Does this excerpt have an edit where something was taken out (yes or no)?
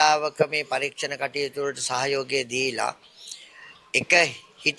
no